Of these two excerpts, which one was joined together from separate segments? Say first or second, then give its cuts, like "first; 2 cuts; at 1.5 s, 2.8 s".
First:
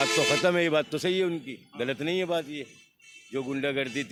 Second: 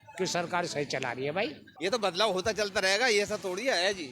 second; 1 cut; at 1.7 s